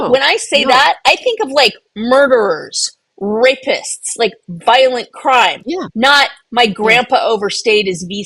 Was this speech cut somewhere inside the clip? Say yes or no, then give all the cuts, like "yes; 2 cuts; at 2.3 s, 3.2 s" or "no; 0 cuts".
no; 0 cuts